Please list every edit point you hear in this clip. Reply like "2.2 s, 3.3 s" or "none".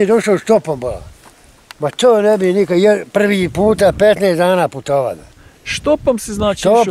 none